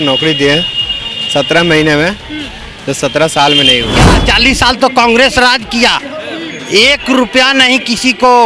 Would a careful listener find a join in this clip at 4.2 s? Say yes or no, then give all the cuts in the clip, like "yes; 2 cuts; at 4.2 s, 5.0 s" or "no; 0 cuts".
yes; 1 cut; at 4.2 s